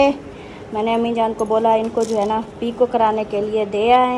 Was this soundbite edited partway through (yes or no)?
no